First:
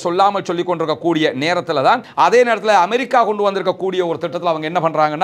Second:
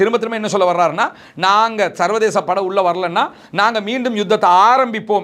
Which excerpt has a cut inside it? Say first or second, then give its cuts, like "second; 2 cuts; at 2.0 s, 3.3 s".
first; 1 cut; at 2.1 s